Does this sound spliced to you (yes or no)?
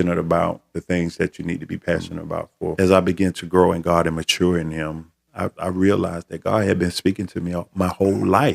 yes